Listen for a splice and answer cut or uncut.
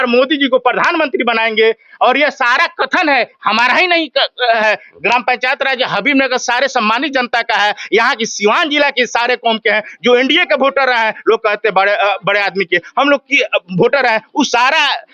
uncut